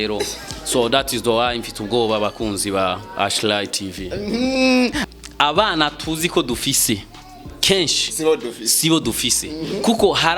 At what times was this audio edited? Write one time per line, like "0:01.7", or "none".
0:05.0

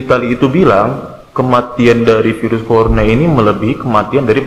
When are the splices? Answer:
none

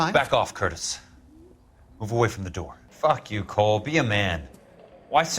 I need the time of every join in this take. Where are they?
0:02.8

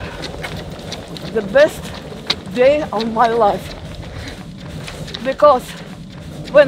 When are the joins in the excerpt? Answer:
0:04.4

